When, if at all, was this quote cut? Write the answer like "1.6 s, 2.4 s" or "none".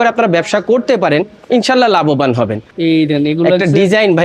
2.7 s